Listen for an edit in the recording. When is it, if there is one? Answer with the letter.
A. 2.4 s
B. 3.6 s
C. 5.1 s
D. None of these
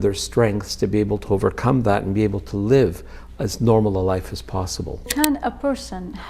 C